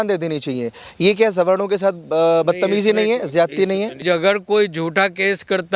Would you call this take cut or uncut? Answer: cut